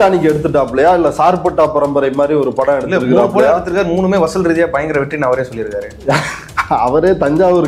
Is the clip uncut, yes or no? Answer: yes